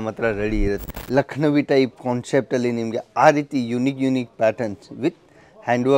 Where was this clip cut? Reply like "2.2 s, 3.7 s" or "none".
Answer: 0.9 s